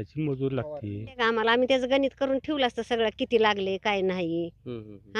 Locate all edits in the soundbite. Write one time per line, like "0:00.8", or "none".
0:01.2